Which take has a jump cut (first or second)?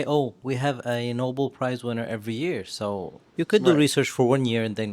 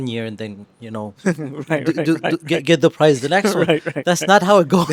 first